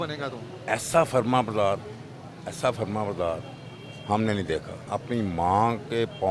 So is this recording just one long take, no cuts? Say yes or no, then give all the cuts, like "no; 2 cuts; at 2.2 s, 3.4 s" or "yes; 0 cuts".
no; 1 cut; at 4.8 s